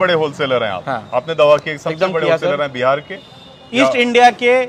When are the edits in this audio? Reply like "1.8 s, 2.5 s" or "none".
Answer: none